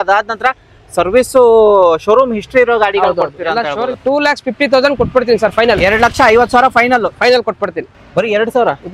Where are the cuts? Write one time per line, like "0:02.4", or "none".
0:03.9
0:07.7